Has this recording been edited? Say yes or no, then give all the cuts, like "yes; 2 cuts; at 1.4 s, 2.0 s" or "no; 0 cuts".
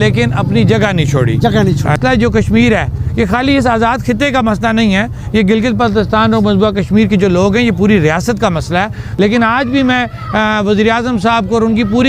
yes; 2 cuts; at 2.0 s, 9.0 s